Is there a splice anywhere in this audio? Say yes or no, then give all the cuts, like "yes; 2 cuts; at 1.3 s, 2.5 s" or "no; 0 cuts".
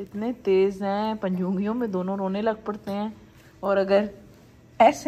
no; 0 cuts